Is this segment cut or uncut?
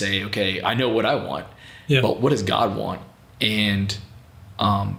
uncut